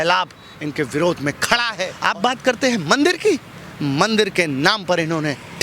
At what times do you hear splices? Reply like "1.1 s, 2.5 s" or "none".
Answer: 1.8 s